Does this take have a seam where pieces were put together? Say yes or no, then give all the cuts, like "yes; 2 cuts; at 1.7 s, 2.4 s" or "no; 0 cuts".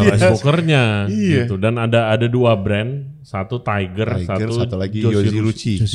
no; 0 cuts